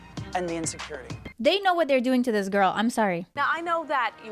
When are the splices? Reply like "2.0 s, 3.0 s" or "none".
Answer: 1.3 s, 3.2 s

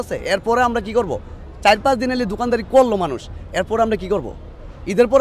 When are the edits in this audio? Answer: none

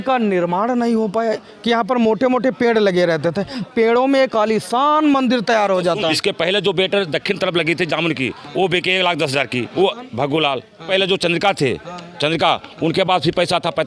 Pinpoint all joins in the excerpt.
1.5 s, 3.6 s, 6.1 s, 9.7 s, 10.9 s

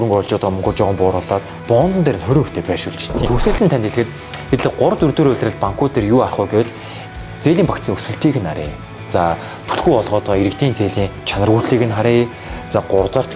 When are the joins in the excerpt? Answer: 3.2 s

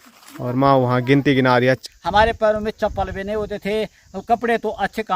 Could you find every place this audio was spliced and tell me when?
1.8 s

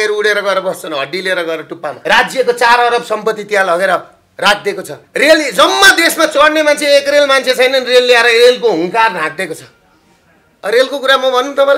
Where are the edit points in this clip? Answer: 2.0 s, 5.0 s

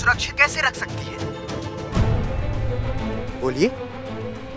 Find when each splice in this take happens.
3.3 s

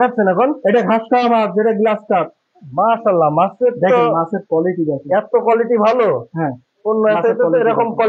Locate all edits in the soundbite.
none

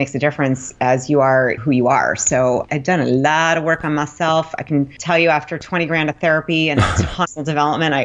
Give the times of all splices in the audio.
1.6 s, 2.7 s, 5.0 s

